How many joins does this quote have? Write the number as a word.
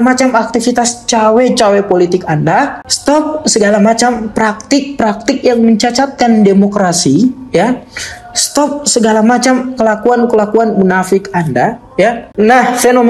two